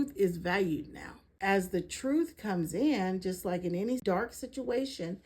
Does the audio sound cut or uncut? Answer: cut